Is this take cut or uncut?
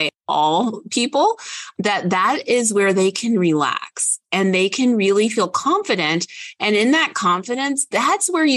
uncut